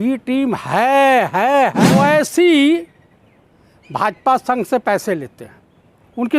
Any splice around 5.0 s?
no; 1 cut; at 1.8 s

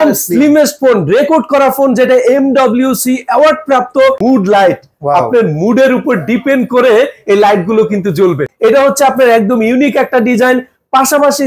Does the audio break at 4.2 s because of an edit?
yes; 2 cuts; at 4.2 s, 8.5 s

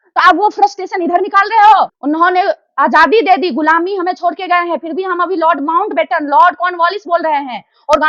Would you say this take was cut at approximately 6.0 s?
no; 1 cut; at 2.0 s

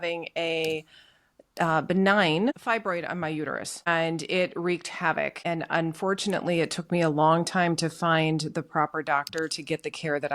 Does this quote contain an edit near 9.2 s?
no; 3 cuts; at 2.6 s, 3.9 s, 5.4 s

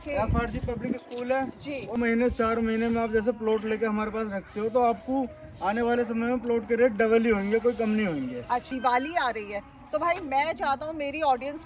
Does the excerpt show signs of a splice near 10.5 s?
no; 2 cuts; at 2.0 s, 8.7 s

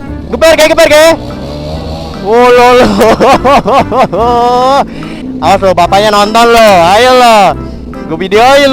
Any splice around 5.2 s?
yes; 1 cut; at 5.2 s

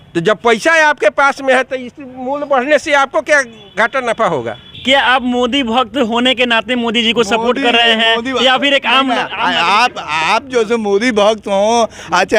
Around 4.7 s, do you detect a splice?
yes; 1 cut; at 4.7 s

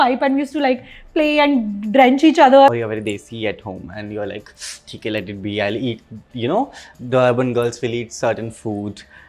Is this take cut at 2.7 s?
yes; 1 cut; at 2.7 s

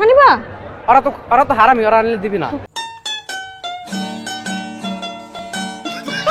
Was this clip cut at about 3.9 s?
no; 0 cuts

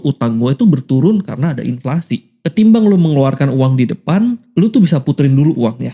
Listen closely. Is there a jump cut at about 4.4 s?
yes; 2 cuts; at 2.3 s, 4.4 s

